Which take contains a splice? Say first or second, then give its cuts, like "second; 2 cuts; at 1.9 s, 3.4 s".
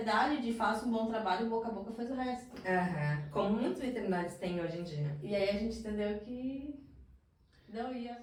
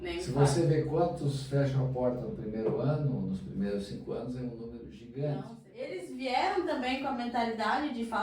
second; 1 cut; at 6.0 s